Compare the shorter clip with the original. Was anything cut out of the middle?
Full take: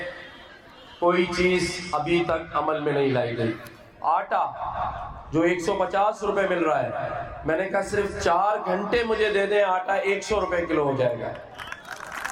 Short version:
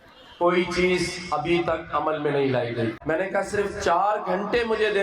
yes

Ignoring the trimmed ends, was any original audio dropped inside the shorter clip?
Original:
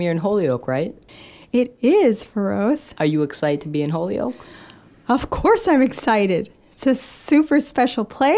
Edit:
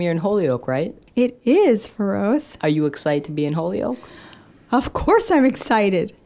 yes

